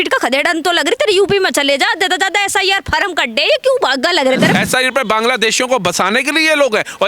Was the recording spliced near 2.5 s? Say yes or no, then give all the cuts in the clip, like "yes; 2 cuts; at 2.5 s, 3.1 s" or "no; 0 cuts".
no; 1 cut; at 4.5 s